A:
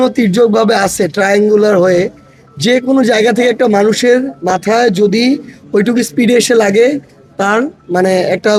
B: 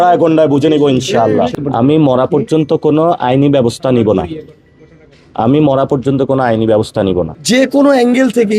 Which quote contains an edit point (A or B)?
B